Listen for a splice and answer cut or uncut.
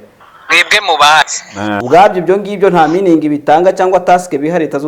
cut